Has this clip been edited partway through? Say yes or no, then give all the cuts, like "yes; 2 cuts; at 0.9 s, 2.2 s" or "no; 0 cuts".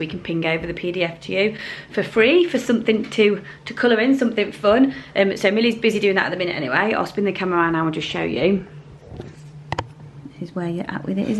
no; 0 cuts